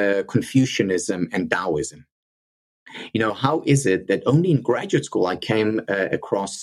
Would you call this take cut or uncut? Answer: uncut